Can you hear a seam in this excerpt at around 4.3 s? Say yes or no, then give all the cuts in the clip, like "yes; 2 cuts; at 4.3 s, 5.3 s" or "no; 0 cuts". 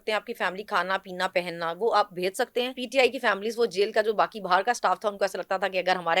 no; 1 cut; at 2.8 s